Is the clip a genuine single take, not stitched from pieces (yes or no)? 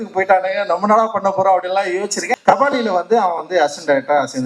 no